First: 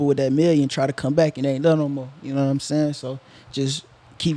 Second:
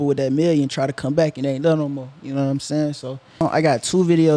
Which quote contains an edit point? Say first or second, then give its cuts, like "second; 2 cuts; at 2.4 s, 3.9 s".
second; 1 cut; at 3.4 s